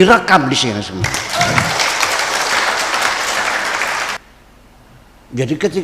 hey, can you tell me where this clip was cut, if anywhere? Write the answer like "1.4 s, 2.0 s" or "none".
4.2 s